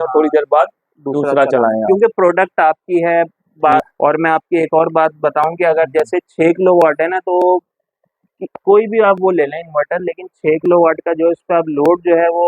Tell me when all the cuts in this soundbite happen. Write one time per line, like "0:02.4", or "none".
0:03.9